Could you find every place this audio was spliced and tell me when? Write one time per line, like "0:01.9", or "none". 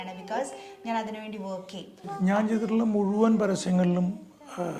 0:02.0